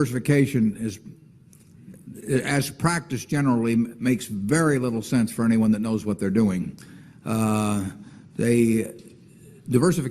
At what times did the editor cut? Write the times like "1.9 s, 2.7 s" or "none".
none